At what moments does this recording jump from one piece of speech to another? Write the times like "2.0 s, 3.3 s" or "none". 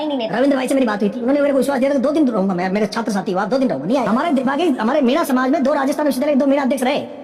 4.1 s